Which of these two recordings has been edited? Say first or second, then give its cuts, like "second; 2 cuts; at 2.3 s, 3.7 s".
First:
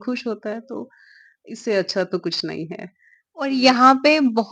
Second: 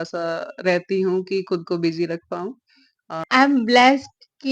second; 1 cut; at 3.2 s